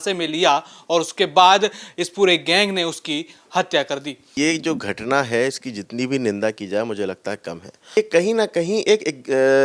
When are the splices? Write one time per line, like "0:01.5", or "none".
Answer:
0:04.3
0:08.0